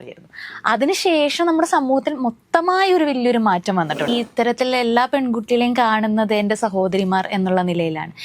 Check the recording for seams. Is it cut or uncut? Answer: cut